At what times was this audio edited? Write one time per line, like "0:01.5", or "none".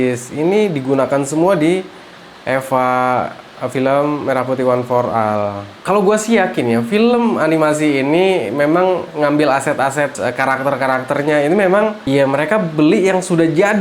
0:05.8